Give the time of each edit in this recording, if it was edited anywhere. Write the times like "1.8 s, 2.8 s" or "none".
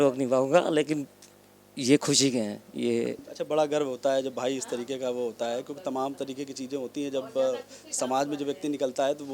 none